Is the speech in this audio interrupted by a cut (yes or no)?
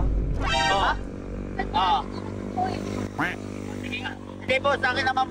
no